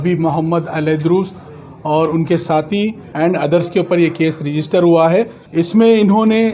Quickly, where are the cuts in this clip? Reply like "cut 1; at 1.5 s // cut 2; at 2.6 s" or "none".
cut 1; at 3.0 s // cut 2; at 5.4 s